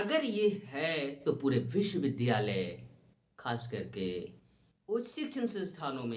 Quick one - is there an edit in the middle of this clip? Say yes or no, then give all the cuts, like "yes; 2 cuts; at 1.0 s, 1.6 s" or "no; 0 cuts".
no; 0 cuts